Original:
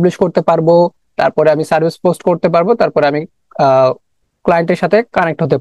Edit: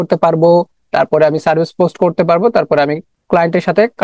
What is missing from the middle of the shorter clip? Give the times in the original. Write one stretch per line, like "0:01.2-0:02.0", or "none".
0:03.3-0:04.2